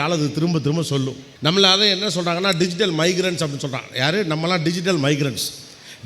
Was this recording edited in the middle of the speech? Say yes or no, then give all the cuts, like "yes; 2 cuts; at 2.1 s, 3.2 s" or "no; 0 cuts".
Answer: yes; 1 cut; at 1.2 s